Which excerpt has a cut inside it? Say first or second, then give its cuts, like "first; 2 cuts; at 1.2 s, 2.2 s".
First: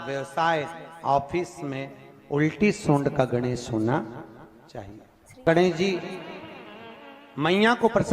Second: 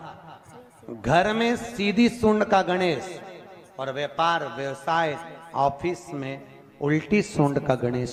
first; 1 cut; at 5.4 s